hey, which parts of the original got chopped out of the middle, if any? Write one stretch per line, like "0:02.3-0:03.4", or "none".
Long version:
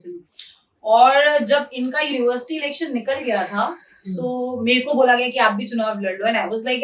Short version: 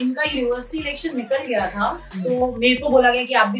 0:04.0-0:04.3